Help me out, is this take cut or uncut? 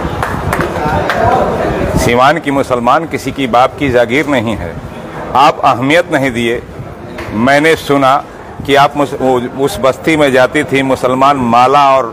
uncut